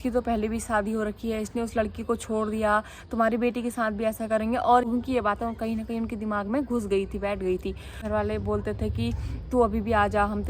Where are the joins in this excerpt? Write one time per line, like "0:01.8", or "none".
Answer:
0:04.9
0:08.0